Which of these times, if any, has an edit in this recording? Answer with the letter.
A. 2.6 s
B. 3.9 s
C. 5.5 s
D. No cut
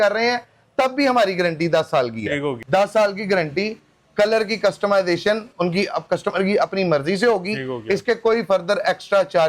A